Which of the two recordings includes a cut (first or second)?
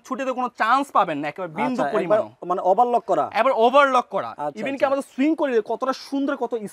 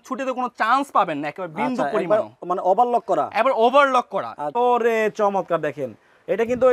second